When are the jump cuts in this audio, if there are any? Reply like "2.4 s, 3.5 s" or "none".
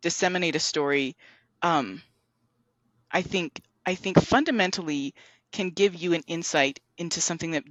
none